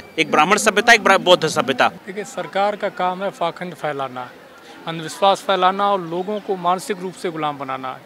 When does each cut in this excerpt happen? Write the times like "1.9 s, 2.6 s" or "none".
2.1 s